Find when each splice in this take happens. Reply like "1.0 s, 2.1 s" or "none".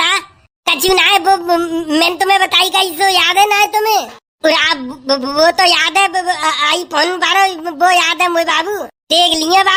none